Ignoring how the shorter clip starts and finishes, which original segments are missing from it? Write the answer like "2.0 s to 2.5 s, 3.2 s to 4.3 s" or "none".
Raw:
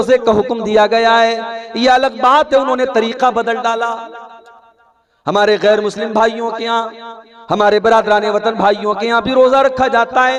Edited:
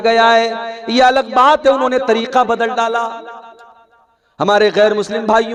none